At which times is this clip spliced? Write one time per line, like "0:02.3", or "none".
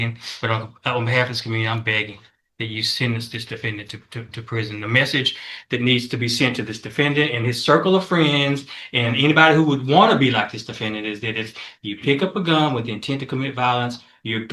none